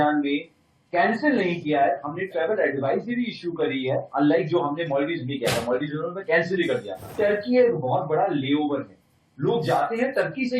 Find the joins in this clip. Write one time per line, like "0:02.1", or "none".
0:07.0